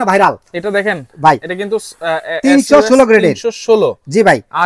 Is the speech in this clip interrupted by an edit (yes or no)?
no